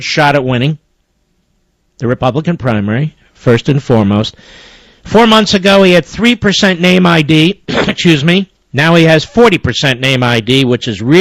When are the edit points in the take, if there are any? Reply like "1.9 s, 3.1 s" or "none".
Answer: none